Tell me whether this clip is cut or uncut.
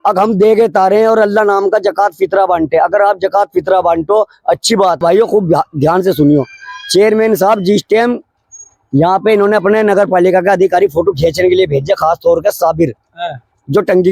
cut